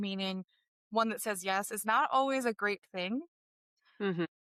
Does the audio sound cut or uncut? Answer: uncut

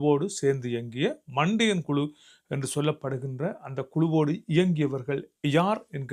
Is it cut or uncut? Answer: uncut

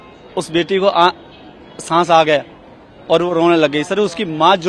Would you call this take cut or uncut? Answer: uncut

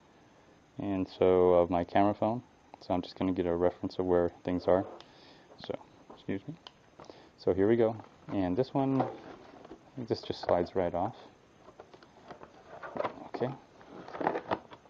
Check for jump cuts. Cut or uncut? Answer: cut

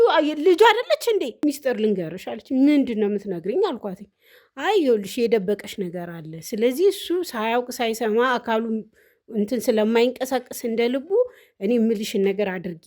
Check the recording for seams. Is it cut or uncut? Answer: cut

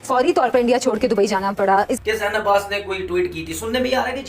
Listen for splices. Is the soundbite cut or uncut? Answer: cut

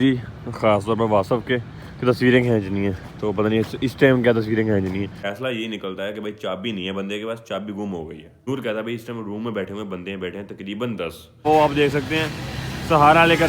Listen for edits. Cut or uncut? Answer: cut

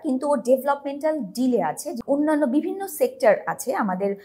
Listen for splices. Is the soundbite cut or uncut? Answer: uncut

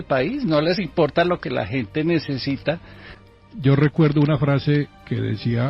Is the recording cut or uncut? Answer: cut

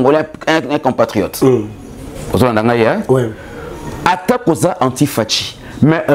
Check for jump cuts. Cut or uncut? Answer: uncut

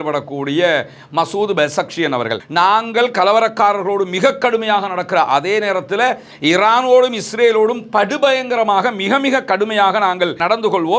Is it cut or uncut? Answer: cut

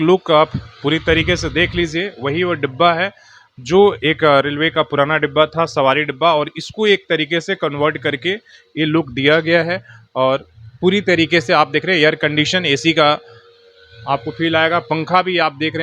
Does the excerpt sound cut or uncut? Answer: uncut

